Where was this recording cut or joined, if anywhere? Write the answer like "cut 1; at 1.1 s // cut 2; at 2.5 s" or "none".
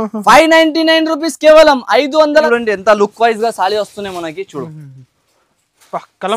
cut 1; at 2.5 s